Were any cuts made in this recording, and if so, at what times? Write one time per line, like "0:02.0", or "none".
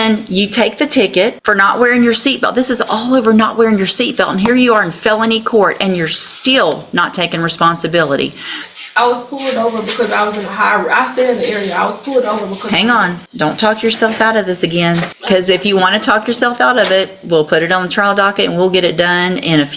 0:01.4
0:08.6
0:13.2
0:15.1